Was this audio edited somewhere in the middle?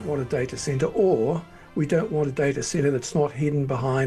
no; 0 cuts

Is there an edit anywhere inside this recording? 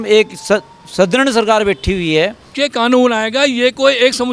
yes; 1 cut; at 2.4 s

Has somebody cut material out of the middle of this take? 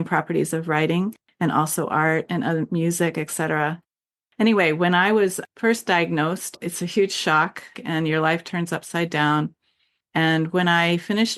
yes; 4 cuts; at 3.8 s, 5.4 s, 6.5 s, 7.8 s

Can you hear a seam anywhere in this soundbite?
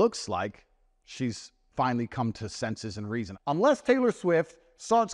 yes; 1 cut; at 3.3 s

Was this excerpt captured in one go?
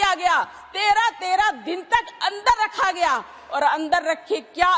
yes; 0 cuts

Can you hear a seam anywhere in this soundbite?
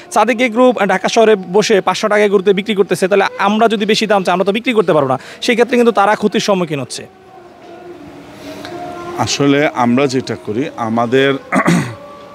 no; 0 cuts

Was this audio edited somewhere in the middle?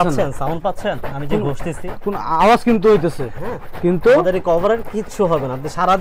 no; 0 cuts

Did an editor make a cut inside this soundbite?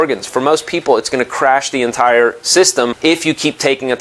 yes; 1 cut; at 3.0 s

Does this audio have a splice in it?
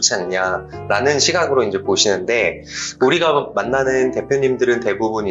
yes; 1 cut; at 2.9 s

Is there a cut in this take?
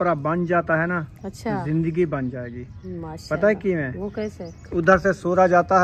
no; 0 cuts

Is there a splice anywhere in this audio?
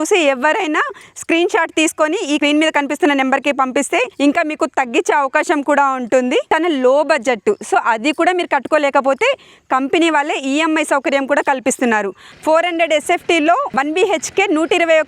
yes; 5 cuts; at 2.4 s, 4.1 s, 6.5 s, 12.3 s, 13.7 s

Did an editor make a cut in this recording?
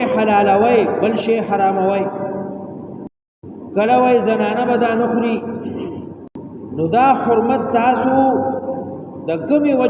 yes; 2 cuts; at 3.3 s, 6.2 s

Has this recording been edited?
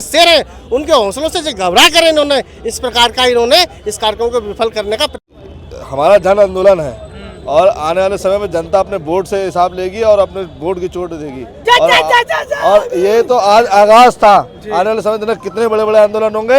yes; 1 cut; at 5.1 s

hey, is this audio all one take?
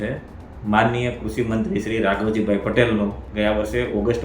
no; 1 cut; at 3.2 s

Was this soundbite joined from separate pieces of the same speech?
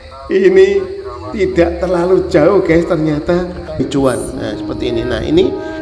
yes; 1 cut; at 3.8 s

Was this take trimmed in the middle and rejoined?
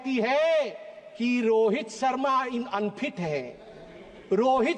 no; 0 cuts

